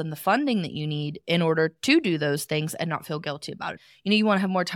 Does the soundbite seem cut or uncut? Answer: cut